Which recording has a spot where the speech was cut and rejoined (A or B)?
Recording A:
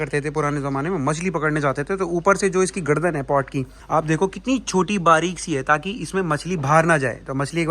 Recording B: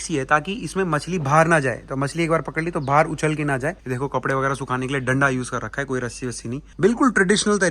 B